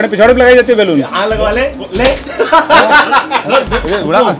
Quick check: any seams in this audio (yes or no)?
yes